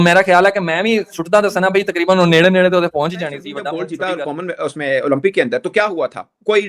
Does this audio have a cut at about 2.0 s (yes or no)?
no